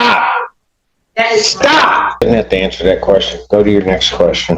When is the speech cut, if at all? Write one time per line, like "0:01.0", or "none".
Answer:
0:02.1